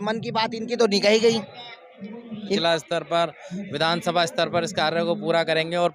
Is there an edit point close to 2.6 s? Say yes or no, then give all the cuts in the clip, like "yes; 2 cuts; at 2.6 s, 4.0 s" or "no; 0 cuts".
yes; 1 cut; at 2.6 s